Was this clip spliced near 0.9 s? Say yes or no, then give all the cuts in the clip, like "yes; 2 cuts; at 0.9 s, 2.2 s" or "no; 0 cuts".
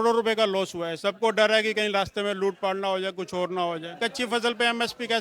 yes; 2 cuts; at 0.9 s, 4.0 s